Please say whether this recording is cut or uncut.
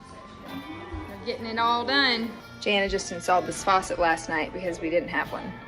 cut